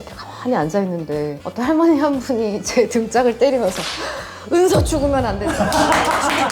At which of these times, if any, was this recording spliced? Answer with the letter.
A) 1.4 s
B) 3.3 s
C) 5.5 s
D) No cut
A